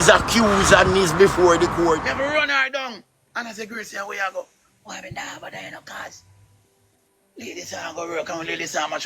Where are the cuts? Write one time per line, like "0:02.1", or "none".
0:02.1